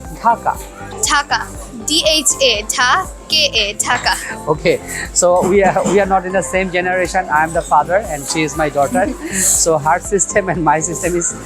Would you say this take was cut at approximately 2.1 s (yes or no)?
no